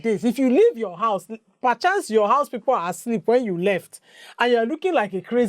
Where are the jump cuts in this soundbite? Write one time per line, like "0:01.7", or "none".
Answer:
none

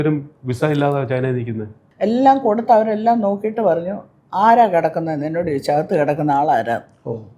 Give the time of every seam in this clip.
0:01.8

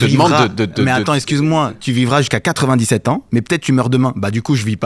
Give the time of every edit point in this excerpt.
0:01.7
0:03.2

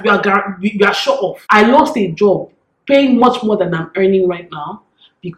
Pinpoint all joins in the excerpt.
0:01.4

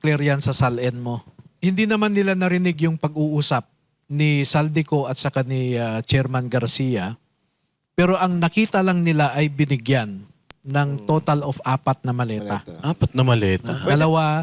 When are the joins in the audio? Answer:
0:01.5

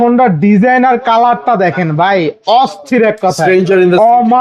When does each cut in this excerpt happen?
none

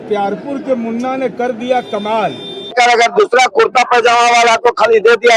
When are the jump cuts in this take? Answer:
0:02.7

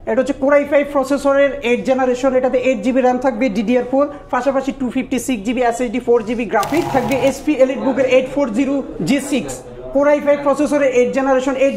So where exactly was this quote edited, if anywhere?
0:06.9

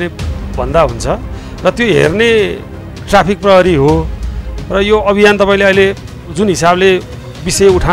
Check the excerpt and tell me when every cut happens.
none

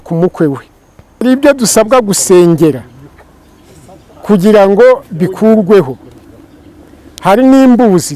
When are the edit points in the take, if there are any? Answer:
0:01.2

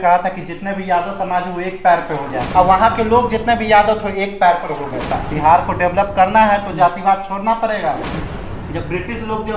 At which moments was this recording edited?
0:02.4
0:05.2
0:08.2

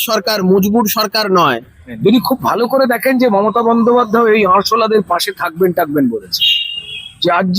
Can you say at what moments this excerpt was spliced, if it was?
0:02.0

